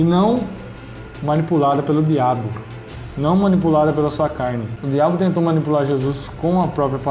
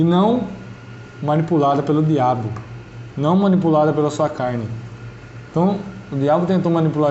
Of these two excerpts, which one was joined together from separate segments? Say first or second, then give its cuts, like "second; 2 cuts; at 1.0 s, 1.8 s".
first; 1 cut; at 4.7 s